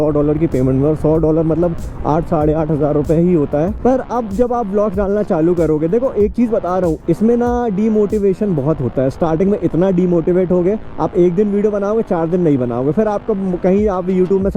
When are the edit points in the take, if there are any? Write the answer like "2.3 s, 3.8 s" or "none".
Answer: 3.7 s